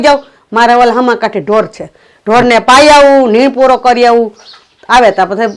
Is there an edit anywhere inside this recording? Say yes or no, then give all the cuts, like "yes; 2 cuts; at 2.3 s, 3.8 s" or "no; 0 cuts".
no; 0 cuts